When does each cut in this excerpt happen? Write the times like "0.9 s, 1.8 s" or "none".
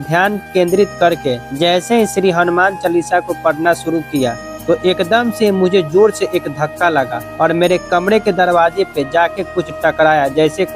1.5 s, 4.5 s, 7.2 s